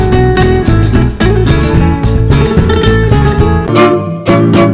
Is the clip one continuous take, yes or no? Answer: no